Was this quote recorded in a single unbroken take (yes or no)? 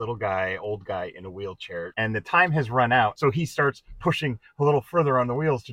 no